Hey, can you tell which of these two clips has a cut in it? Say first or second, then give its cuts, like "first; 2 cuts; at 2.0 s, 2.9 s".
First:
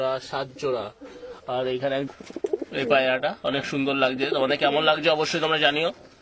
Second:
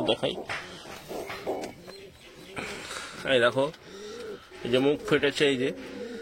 first; 1 cut; at 2.1 s